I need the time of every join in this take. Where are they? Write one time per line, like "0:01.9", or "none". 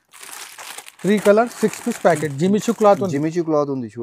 none